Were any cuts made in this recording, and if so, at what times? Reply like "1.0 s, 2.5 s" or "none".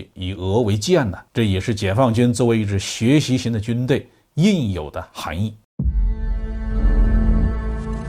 5.6 s